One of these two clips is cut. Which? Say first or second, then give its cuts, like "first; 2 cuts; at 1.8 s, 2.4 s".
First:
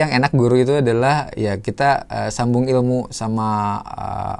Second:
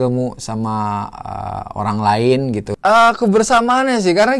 second; 1 cut; at 2.7 s